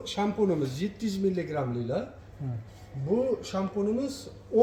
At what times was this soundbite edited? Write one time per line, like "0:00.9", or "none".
none